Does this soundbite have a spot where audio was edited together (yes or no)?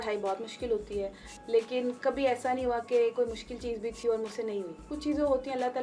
yes